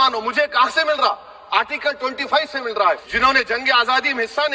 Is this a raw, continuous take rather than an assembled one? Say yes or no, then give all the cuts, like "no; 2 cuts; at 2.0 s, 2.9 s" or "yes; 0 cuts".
no; 1 cut; at 3.1 s